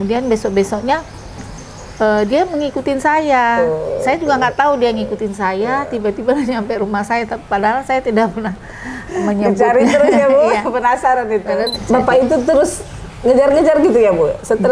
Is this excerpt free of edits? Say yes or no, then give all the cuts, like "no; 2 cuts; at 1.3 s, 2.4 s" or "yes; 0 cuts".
no; 1 cut; at 11.8 s